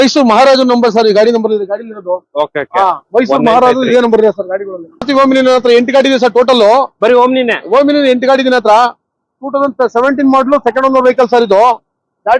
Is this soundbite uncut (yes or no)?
no